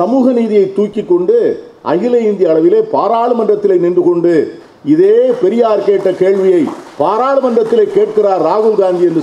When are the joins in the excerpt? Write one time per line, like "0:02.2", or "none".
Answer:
none